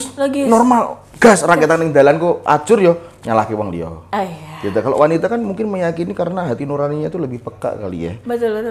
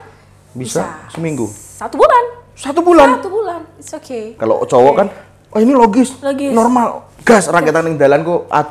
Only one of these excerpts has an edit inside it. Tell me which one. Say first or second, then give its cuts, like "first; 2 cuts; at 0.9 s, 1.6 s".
second; 1 cut; at 4.3 s